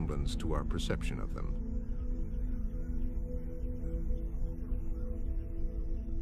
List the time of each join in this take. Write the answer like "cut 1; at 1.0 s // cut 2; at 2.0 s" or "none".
cut 1; at 5.3 s